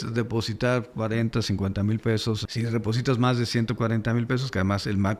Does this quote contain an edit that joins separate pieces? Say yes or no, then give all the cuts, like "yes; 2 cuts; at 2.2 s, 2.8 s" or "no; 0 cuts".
no; 0 cuts